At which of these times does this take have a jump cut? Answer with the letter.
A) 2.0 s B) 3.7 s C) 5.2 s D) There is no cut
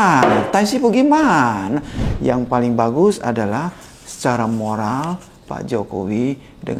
A